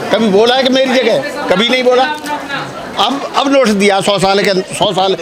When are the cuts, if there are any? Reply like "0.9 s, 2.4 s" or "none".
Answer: none